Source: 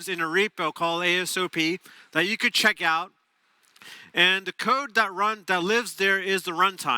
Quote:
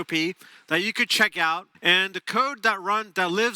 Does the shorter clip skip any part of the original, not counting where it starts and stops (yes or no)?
yes